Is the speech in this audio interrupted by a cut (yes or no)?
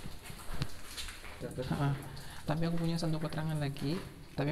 yes